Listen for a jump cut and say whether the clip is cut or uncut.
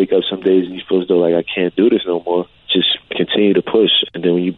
cut